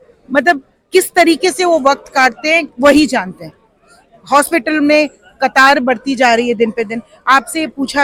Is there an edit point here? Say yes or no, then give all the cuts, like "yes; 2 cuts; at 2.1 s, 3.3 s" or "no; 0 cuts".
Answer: no; 0 cuts